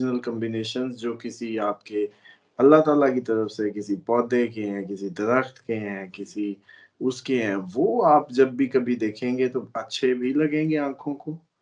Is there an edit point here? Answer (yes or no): no